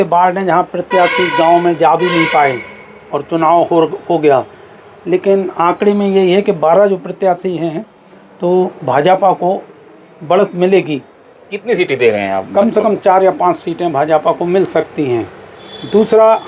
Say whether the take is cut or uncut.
uncut